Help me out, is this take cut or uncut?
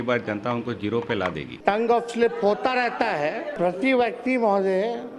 cut